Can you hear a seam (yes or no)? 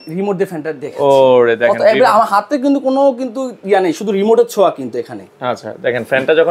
no